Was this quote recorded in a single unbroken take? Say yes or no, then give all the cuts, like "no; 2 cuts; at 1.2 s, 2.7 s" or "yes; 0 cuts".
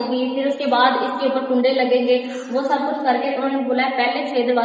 yes; 0 cuts